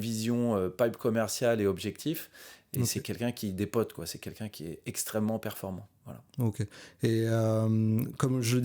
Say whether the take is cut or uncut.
uncut